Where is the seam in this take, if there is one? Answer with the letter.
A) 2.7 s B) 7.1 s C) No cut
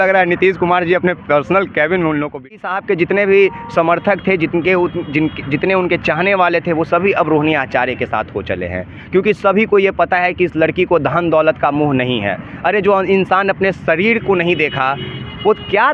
A